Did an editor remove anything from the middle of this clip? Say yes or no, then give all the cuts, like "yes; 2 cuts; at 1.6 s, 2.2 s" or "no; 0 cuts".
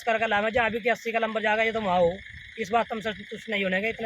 no; 0 cuts